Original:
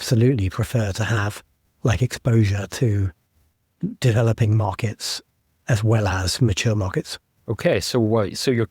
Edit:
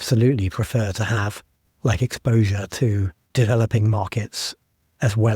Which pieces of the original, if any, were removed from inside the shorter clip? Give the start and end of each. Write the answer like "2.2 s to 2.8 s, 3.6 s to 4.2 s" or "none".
3.3 s to 4.0 s